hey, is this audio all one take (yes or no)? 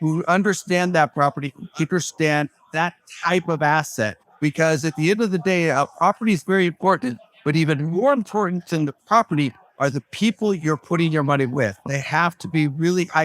no